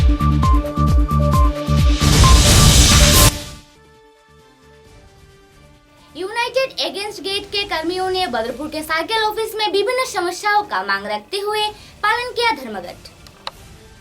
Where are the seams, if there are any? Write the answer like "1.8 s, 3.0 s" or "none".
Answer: 5.8 s